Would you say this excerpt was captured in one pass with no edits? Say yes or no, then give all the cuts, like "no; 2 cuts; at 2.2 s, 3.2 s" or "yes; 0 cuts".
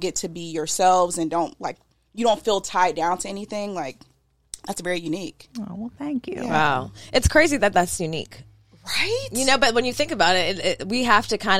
yes; 0 cuts